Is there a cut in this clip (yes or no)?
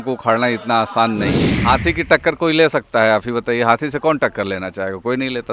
yes